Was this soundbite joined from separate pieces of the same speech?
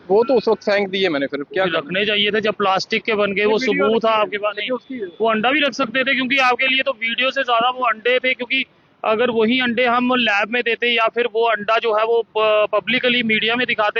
no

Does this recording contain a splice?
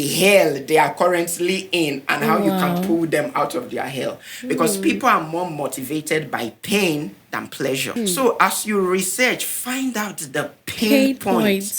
yes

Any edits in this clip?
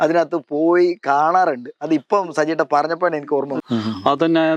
yes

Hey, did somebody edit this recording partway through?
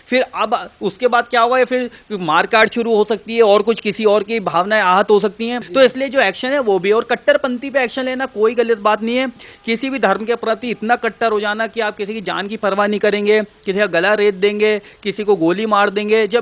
yes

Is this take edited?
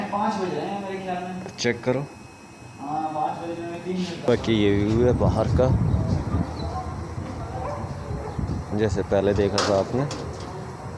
yes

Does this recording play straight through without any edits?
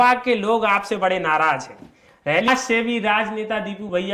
no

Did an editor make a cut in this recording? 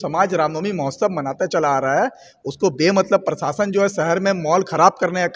no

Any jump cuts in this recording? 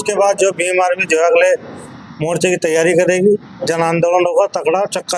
no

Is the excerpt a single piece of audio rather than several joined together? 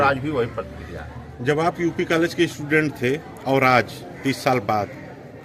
yes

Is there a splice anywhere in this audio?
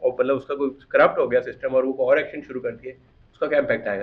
no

